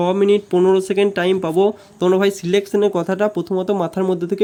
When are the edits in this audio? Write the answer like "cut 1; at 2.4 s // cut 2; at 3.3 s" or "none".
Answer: none